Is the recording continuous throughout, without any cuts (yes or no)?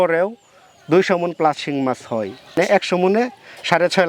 no